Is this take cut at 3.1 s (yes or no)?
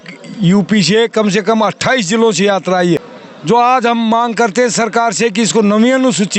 yes